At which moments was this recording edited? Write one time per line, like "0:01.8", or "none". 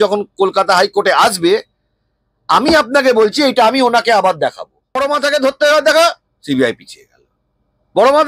0:05.0

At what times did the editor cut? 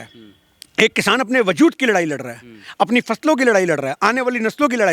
none

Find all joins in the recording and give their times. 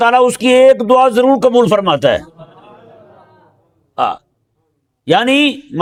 none

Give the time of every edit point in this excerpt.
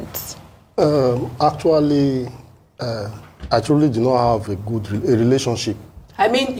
none

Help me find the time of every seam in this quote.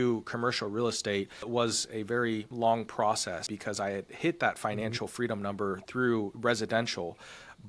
0:01.5
0:02.5
0:03.5

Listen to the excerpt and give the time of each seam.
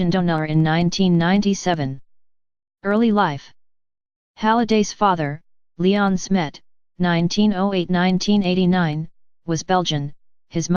0:04.8

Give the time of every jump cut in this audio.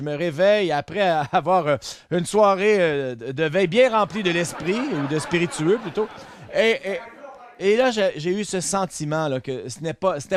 none

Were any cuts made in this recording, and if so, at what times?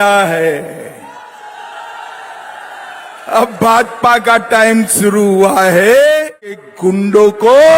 0:06.7

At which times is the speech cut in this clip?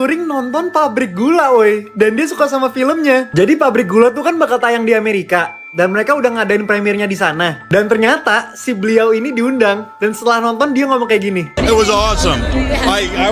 none

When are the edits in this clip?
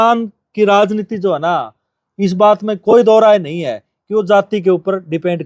none

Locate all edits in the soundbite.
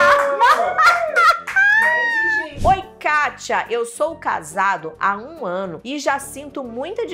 0:02.6

